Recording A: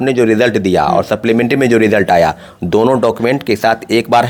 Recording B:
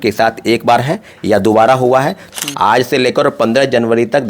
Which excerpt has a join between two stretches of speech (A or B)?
B